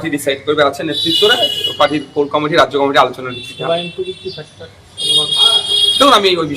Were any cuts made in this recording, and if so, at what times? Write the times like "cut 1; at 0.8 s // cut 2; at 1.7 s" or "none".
none